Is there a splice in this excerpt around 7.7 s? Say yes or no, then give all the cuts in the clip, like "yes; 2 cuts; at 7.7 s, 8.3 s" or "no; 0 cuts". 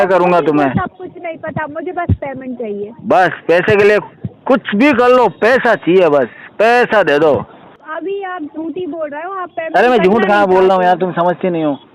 yes; 1 cut; at 7.7 s